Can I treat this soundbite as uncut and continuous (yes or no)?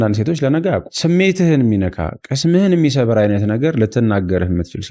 no